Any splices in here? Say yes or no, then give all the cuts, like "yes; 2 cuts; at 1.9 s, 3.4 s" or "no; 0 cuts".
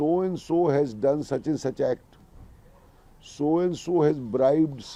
no; 0 cuts